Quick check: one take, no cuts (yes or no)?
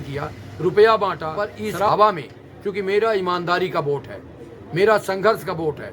no